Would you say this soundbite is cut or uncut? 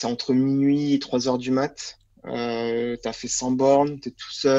uncut